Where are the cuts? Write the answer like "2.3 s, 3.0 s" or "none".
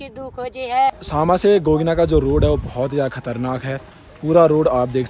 1.0 s